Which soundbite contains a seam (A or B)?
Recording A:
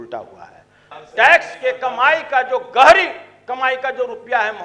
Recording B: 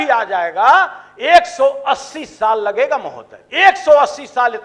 A